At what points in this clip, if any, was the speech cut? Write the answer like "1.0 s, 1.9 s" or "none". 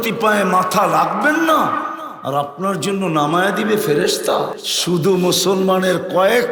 4.7 s